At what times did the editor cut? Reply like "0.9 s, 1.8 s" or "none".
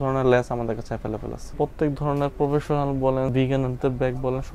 1.5 s, 3.3 s